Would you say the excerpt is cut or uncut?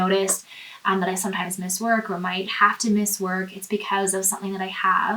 uncut